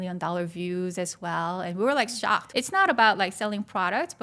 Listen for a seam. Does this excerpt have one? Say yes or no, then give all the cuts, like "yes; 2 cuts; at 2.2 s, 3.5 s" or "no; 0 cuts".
yes; 1 cut; at 2.5 s